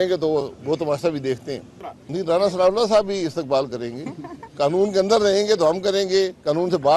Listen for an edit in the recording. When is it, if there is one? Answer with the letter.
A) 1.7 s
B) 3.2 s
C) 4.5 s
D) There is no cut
A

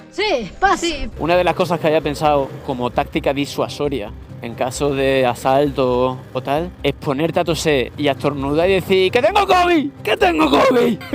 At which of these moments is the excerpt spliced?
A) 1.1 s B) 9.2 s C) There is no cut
A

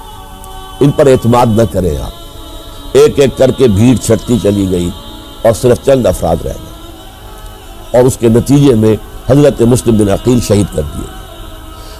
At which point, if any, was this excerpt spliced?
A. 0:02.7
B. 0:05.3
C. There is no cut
A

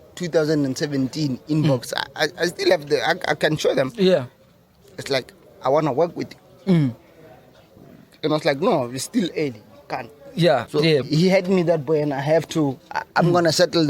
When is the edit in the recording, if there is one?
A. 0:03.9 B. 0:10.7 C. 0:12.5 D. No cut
B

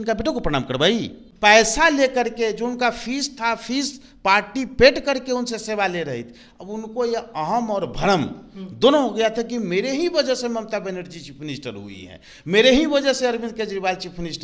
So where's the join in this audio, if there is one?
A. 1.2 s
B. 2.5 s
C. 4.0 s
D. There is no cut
A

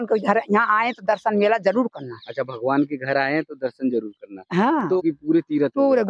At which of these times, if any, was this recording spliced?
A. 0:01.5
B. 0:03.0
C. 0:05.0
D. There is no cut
C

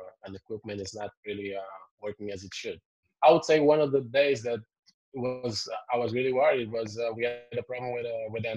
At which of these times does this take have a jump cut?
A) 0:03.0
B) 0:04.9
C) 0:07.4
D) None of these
A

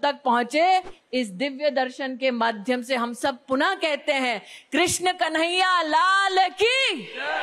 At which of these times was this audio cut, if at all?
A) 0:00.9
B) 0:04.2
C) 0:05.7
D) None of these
A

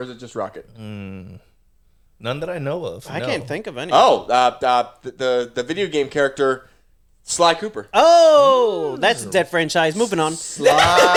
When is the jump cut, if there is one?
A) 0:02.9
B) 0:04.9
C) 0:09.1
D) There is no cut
D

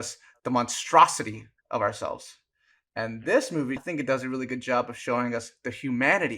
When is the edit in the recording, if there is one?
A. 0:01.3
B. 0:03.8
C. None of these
B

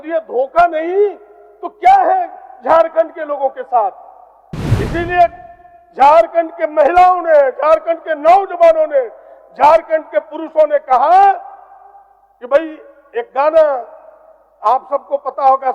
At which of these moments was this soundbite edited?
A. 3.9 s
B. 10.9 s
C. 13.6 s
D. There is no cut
D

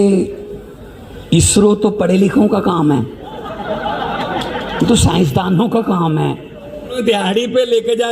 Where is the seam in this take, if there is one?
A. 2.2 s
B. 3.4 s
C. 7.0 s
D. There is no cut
C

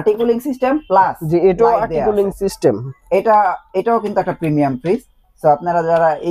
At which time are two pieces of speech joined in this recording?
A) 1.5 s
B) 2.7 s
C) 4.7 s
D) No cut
D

